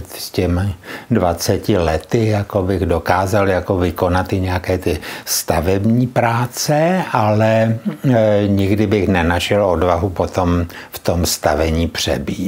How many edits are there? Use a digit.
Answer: 0